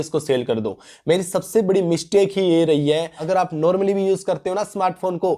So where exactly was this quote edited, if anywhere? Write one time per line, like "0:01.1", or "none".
0:03.1